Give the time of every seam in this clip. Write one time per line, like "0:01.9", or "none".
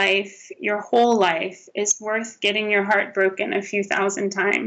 none